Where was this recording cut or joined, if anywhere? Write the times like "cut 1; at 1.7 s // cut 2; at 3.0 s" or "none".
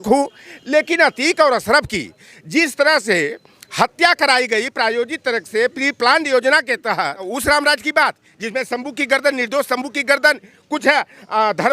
cut 1; at 7.3 s

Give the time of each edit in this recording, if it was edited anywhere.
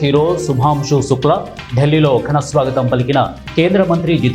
none

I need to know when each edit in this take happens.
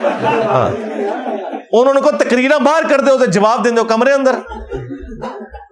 none

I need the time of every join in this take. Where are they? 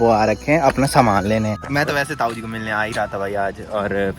cut 1; at 1.6 s

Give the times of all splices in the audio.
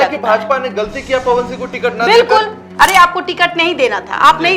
cut 1; at 2.6 s

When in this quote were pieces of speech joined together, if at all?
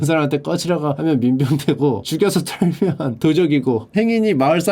cut 1; at 3.8 s

